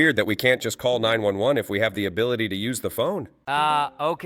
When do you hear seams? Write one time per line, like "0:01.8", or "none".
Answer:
0:03.3